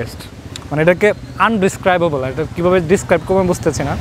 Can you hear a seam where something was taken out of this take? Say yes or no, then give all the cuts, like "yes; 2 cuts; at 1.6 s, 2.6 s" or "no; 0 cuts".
no; 0 cuts